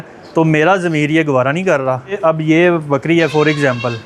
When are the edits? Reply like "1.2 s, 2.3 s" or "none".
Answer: 2.2 s

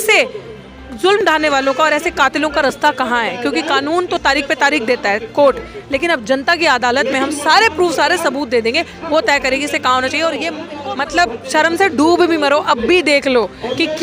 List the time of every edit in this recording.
10.7 s

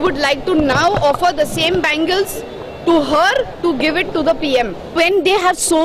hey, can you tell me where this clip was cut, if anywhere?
4.9 s

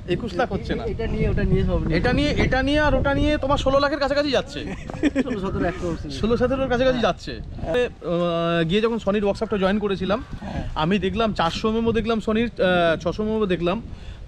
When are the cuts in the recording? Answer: 7.7 s

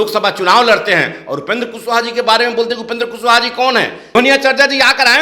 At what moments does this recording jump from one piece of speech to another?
4.2 s

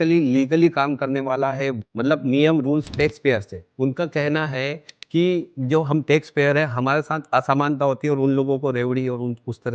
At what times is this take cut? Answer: 1.8 s, 3.7 s

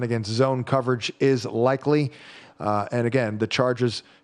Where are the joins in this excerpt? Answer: none

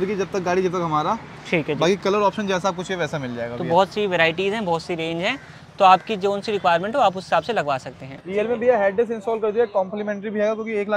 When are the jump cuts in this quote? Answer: none

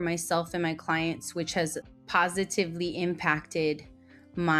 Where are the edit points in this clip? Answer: 1.9 s

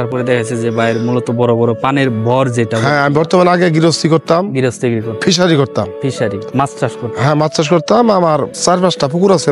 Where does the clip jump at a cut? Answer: 8.5 s

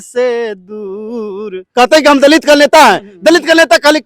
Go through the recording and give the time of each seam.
1.6 s

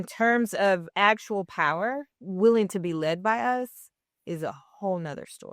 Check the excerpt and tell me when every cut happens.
2.2 s

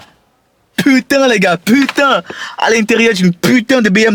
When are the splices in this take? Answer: none

